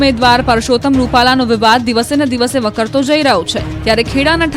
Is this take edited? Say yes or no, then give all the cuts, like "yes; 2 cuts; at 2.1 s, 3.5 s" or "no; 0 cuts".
no; 0 cuts